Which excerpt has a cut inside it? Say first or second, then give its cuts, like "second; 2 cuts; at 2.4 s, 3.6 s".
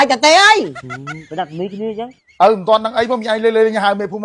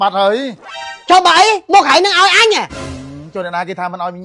first; 1 cut; at 2.2 s